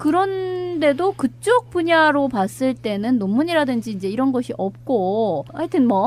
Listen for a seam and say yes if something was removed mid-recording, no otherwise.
no